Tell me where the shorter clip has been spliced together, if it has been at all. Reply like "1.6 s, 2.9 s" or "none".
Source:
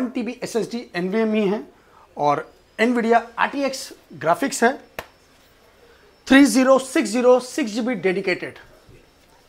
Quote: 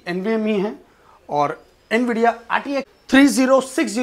3.0 s